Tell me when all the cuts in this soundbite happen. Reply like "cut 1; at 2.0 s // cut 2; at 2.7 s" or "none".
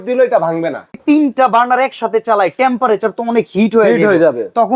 cut 1; at 0.9 s